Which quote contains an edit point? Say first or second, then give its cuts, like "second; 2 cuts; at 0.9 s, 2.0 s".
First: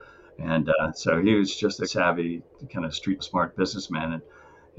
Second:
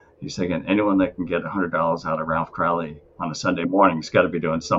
first; 2 cuts; at 1.9 s, 3.2 s